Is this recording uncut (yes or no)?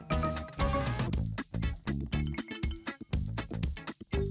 yes